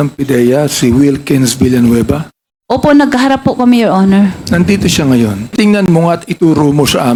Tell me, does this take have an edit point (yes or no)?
no